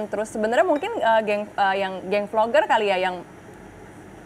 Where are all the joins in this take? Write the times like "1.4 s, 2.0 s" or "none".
none